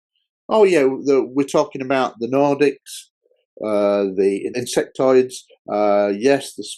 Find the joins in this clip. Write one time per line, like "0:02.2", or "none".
0:04.6